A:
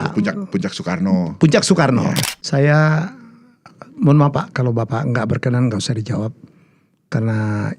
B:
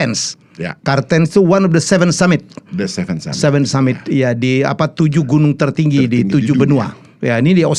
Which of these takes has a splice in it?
A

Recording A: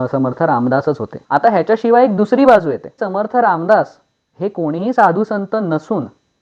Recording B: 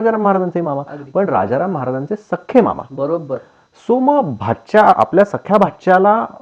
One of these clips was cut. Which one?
A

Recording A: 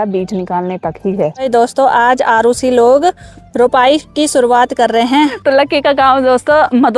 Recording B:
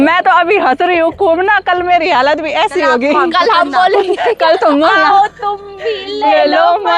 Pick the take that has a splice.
A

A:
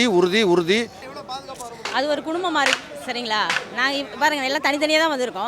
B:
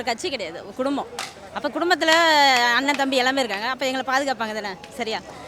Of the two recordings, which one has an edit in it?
A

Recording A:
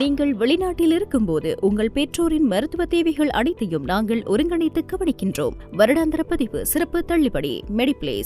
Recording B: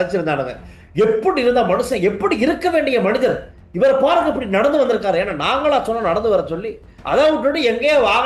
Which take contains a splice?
B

